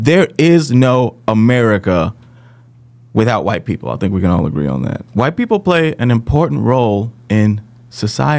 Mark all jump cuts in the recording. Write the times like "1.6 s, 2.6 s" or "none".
none